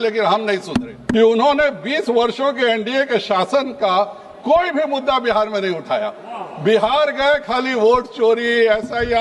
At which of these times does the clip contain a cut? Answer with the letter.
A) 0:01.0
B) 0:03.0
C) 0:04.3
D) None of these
A